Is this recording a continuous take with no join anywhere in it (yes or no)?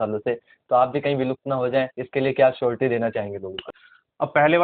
no